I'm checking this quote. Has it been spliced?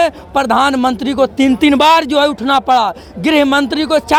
no; 0 cuts

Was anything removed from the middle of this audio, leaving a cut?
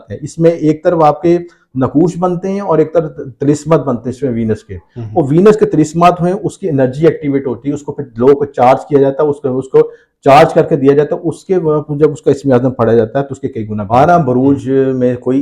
yes; 1 cut; at 13.8 s

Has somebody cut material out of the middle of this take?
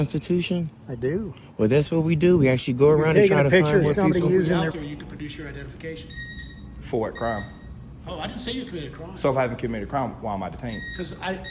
yes; 1 cut; at 4.7 s

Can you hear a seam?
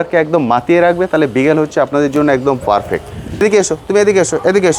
yes; 1 cut; at 3.4 s

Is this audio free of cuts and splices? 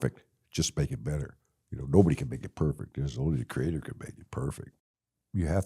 no; 1 cut; at 4.7 s

